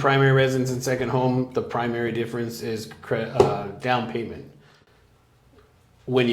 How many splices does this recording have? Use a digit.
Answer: 0